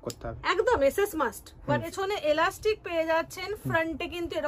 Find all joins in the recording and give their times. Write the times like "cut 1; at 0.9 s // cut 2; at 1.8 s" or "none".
cut 1; at 1.9 s